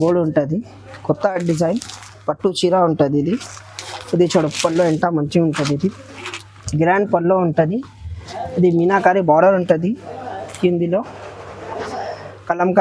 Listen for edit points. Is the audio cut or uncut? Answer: uncut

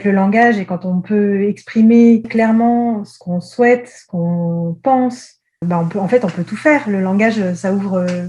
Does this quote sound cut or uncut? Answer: cut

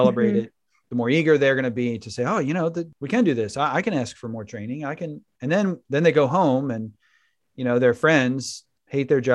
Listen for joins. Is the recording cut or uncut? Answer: cut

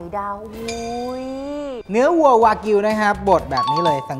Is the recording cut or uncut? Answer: cut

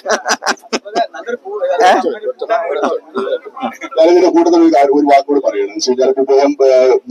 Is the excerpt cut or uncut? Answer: uncut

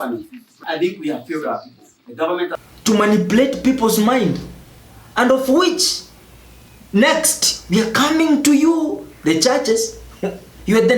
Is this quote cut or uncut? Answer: cut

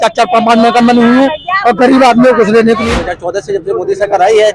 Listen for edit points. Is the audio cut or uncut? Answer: cut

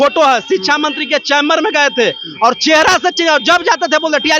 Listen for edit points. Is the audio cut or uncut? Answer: uncut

